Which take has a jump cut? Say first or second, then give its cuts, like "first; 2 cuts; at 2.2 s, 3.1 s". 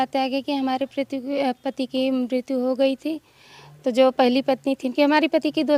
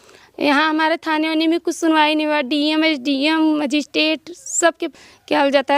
second; 1 cut; at 4.9 s